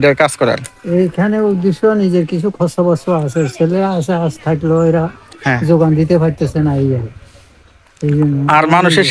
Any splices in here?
no; 0 cuts

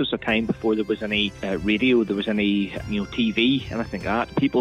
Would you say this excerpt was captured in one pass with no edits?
no; 2 cuts; at 1.4 s, 2.8 s

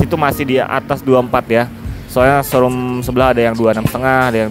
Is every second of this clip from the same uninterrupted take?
yes; 0 cuts

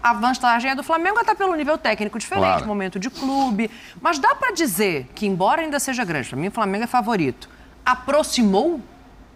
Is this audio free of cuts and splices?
yes; 0 cuts

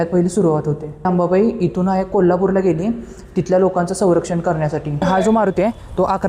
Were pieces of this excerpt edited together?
yes; 2 cuts; at 1.0 s, 4.9 s

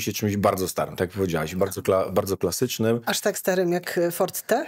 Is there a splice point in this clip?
no; 0 cuts

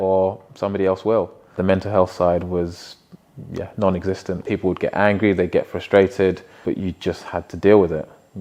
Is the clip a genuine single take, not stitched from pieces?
no; 3 cuts; at 1.6 s, 4.4 s, 6.5 s

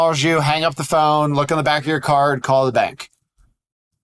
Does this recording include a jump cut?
no; 0 cuts

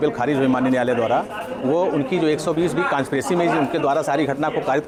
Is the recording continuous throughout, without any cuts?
yes; 0 cuts

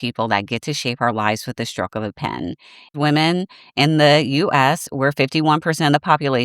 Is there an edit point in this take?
yes; 1 cut; at 2.9 s

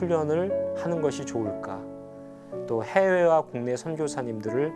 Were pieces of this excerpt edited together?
no; 0 cuts

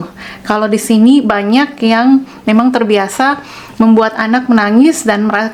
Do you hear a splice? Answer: no; 0 cuts

